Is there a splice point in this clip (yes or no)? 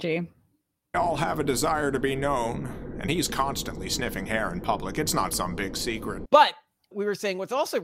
yes